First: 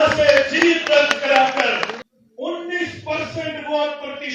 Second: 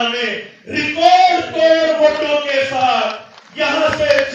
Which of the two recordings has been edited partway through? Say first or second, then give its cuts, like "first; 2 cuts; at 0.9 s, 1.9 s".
first; 1 cut; at 1.9 s